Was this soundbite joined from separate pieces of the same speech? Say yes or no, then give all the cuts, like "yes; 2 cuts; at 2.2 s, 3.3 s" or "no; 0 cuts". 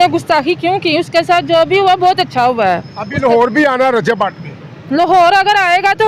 no; 0 cuts